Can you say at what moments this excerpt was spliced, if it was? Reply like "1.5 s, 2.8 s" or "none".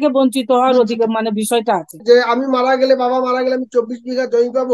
2.0 s